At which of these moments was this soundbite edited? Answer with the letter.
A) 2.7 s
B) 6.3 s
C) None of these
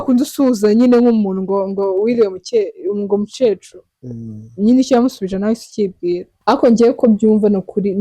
B